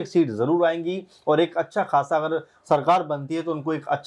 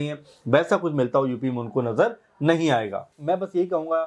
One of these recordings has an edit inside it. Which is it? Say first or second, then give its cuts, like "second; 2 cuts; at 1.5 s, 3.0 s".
second; 1 cut; at 3.1 s